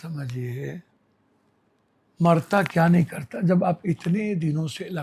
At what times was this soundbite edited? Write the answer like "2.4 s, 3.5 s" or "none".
none